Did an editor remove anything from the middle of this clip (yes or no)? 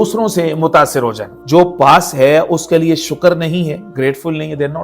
yes